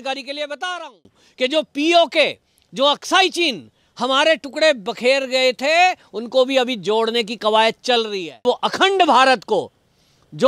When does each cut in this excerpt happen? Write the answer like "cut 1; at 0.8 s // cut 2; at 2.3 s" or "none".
cut 1; at 8.5 s